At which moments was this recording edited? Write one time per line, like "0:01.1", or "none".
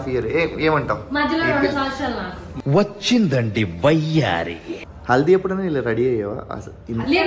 none